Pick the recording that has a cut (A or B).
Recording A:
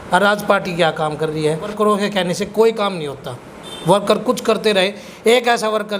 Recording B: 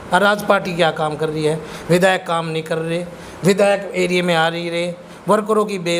A